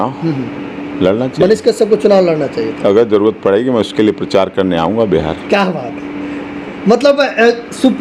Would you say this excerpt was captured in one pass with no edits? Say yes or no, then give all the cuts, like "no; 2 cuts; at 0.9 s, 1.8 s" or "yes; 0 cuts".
yes; 0 cuts